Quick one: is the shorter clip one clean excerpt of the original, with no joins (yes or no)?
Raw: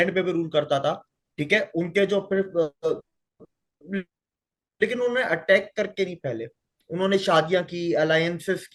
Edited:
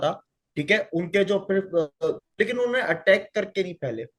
no